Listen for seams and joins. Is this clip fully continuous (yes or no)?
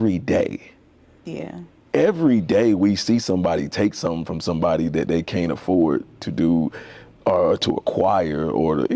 yes